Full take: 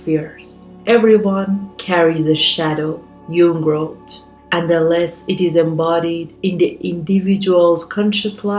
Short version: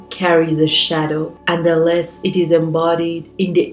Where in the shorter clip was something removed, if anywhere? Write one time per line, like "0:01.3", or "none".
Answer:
0:01.4